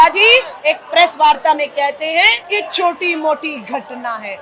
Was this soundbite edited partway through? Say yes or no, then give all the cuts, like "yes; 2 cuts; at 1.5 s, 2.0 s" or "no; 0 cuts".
no; 0 cuts